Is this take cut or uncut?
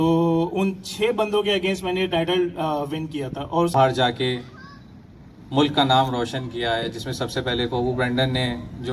cut